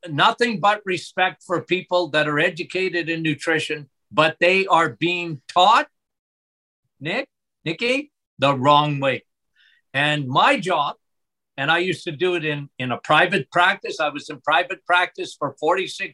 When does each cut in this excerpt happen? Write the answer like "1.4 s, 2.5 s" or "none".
none